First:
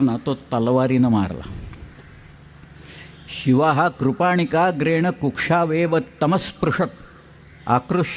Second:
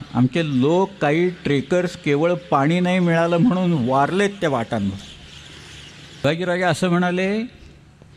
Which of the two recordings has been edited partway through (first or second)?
second